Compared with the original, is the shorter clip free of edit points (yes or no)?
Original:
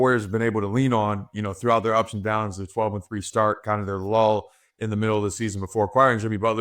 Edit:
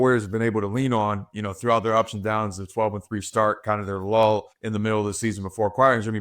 no